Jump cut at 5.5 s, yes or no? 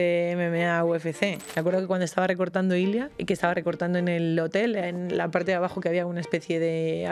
no